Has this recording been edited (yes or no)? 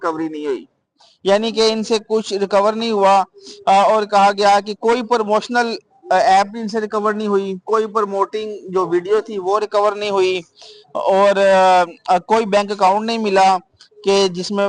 no